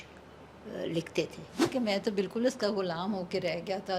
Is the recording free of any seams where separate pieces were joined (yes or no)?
no